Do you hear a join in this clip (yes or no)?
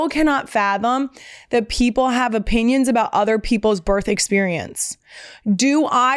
no